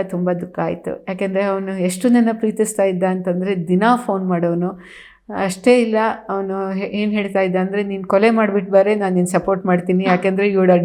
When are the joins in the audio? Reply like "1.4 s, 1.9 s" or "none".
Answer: none